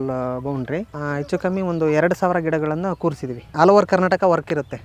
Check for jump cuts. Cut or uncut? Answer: cut